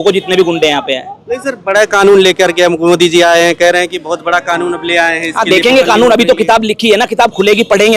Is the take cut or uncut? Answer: uncut